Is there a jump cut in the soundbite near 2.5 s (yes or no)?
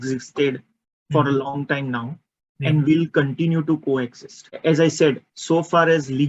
no